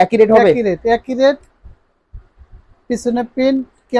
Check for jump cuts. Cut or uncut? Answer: uncut